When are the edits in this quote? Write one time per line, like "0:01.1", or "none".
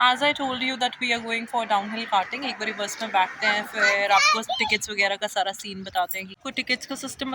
0:06.2

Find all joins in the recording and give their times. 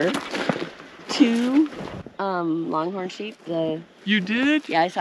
none

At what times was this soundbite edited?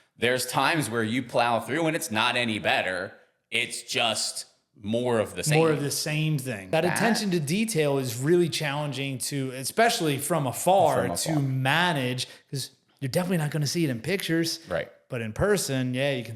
0:06.7

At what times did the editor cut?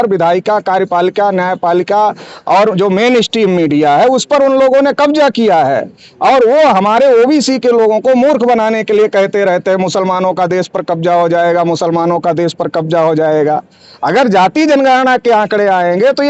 none

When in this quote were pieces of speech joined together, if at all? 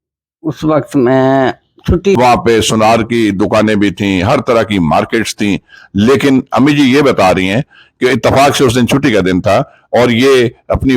0:02.2

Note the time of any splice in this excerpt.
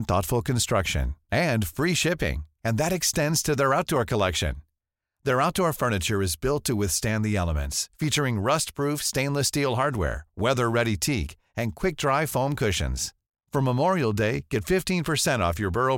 none

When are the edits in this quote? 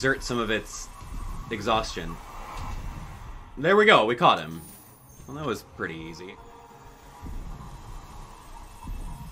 0:06.2

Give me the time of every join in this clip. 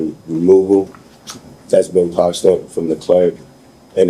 none

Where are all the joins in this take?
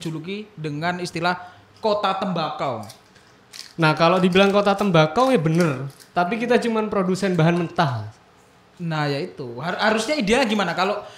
none

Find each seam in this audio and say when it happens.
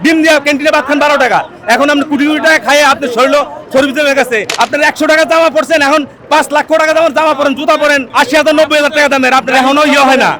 0:04.5
0:08.1

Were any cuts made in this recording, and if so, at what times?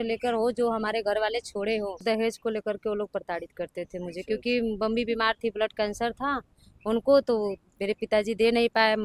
0:02.0

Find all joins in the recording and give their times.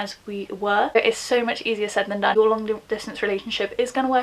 0:00.9
0:02.3

